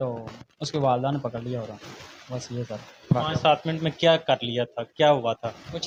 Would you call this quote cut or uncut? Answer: uncut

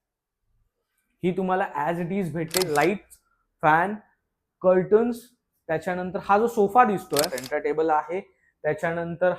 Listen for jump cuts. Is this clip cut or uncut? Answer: cut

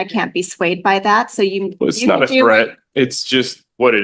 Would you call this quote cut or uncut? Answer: uncut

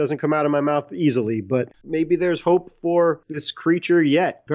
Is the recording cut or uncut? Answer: cut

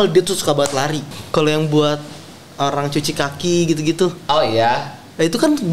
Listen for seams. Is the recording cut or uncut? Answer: cut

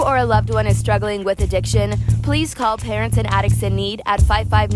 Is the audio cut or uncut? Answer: uncut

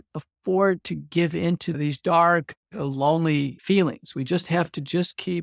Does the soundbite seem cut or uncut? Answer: cut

